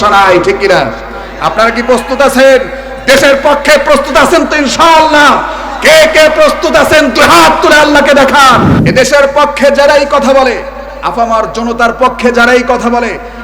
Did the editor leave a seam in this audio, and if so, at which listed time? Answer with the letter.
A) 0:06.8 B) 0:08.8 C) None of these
B